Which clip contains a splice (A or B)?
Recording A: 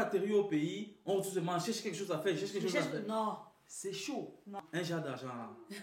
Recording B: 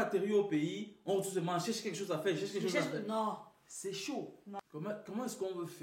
A